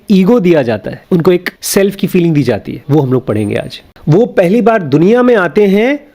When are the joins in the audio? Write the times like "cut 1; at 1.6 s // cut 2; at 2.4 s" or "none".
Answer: cut 1; at 0.9 s // cut 2; at 1.6 s // cut 3; at 2.7 s // cut 4; at 3.8 s